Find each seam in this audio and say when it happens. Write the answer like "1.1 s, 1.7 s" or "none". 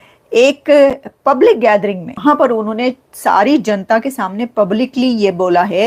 2.1 s